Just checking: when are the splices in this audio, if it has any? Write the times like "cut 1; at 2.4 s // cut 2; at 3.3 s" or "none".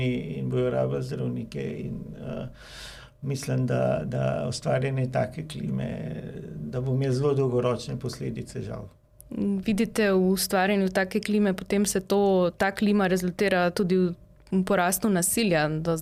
none